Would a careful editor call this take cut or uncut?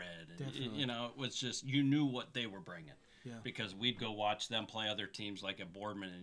uncut